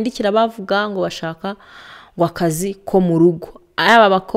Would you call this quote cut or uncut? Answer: uncut